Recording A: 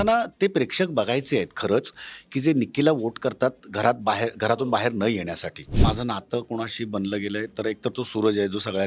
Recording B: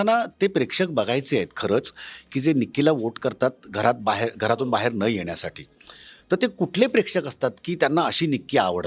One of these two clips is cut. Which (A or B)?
A